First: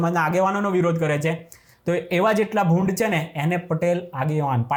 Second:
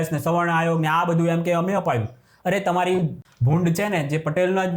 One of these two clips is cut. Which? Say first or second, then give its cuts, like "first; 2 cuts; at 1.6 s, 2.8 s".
second; 1 cut; at 3.2 s